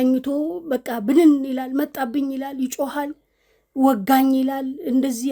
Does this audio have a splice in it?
no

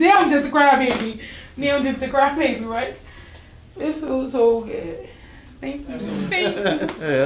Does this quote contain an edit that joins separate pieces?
yes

